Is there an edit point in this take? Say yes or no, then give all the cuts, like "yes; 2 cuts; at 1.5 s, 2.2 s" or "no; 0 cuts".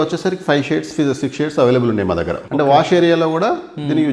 yes; 1 cut; at 2.4 s